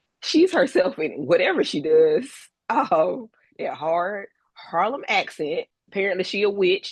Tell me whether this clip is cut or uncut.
cut